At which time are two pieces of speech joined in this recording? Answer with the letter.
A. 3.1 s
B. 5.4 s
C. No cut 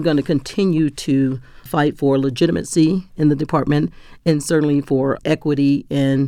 C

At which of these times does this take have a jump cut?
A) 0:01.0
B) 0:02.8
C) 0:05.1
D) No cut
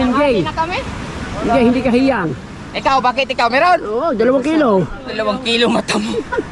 D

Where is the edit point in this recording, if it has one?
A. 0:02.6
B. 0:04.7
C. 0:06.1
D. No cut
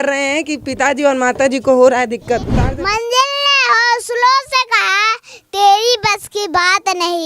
A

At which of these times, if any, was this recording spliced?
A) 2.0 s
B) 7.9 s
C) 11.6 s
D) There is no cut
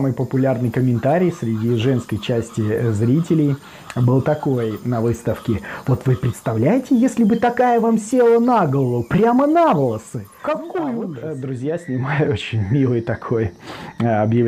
C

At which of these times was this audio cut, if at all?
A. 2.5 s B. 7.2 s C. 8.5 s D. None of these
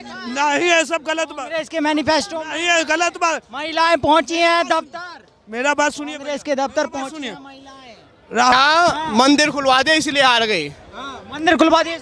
C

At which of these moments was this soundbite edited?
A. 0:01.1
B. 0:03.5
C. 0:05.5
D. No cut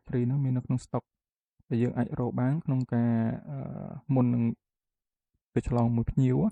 D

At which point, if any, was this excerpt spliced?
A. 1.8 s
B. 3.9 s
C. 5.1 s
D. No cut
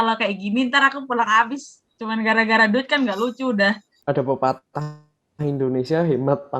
B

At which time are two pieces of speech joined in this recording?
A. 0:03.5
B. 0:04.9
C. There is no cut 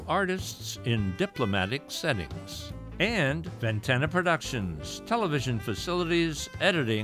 A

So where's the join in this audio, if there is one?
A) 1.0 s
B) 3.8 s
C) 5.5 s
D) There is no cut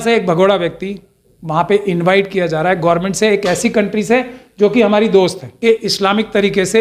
C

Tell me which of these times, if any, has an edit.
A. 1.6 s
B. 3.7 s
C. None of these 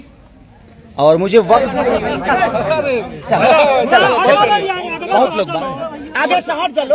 A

